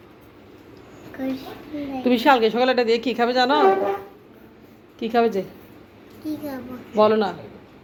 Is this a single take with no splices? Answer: yes; 0 cuts

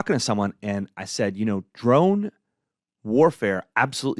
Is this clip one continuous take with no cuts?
yes; 0 cuts

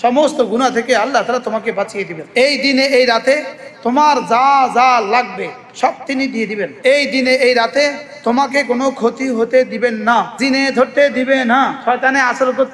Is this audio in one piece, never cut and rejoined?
no; 4 cuts; at 2.1 s, 6.7 s, 10.3 s, 11.8 s

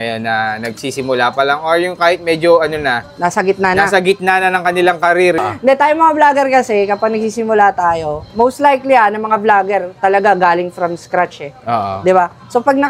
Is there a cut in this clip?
yes; 1 cut; at 5.6 s

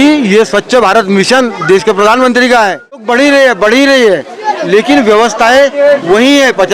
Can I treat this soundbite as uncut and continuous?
no; 1 cut; at 3.1 s

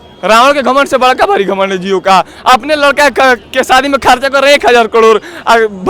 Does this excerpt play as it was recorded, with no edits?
yes; 0 cuts

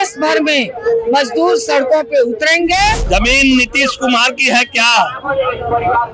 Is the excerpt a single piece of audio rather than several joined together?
no; 1 cut; at 3.1 s

